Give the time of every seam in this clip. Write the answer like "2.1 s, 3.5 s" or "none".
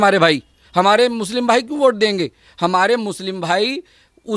none